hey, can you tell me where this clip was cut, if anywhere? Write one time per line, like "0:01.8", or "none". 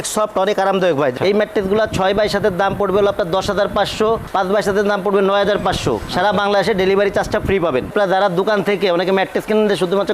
0:01.1
0:07.9